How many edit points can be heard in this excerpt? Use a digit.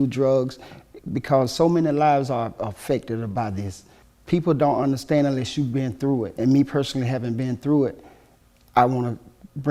2